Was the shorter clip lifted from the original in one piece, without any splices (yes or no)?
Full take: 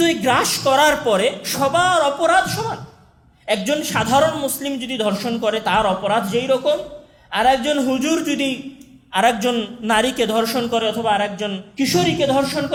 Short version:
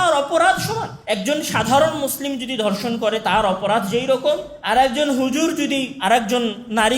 no